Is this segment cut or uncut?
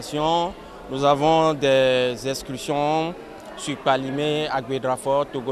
uncut